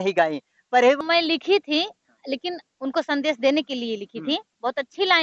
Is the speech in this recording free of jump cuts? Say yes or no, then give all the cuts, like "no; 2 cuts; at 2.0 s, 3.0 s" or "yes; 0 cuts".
no; 1 cut; at 1.0 s